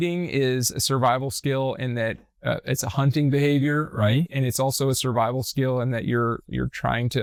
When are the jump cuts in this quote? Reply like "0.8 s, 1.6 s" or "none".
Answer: none